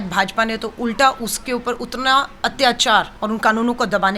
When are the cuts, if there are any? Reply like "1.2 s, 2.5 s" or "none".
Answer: 3.1 s